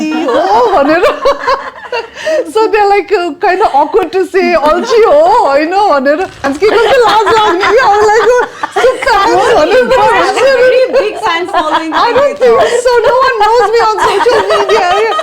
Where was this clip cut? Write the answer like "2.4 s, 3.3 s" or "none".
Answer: 6.5 s